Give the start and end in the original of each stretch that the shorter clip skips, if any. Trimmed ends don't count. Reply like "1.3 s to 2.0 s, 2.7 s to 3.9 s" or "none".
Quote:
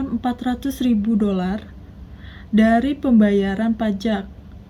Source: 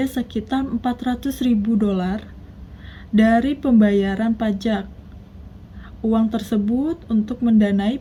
none